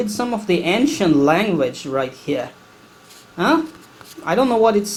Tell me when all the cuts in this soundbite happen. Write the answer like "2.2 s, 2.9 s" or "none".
none